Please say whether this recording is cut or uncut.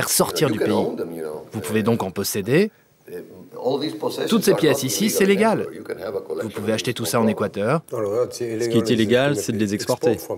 uncut